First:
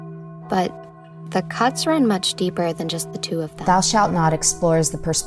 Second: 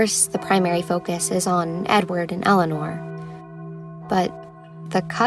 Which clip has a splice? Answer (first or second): first